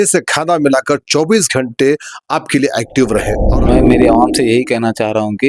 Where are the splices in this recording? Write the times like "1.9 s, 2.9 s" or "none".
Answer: 3.4 s